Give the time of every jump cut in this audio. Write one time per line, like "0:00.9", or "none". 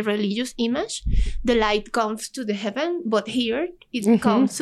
none

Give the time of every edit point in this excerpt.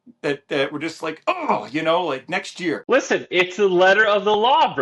0:02.8

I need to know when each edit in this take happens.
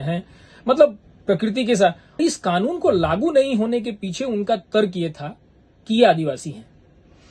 0:02.2

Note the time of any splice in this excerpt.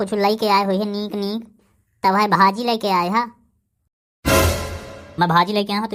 none

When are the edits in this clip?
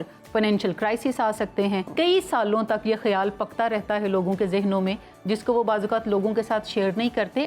0:01.9

